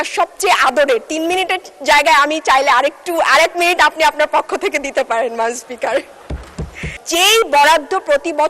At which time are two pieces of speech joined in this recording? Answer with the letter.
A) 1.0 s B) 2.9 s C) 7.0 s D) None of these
C